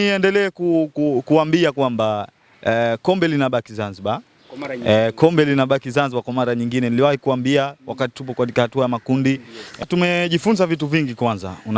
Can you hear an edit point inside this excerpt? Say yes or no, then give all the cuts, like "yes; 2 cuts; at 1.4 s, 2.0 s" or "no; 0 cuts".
yes; 1 cut; at 9.8 s